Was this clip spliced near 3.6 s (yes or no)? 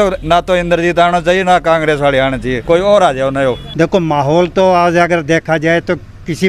yes